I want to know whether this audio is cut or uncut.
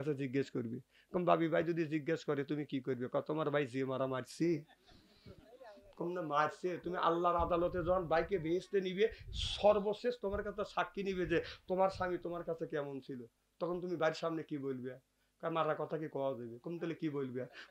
uncut